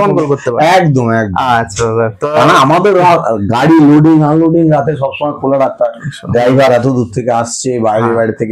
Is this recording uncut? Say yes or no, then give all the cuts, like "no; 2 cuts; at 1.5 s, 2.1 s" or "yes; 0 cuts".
yes; 0 cuts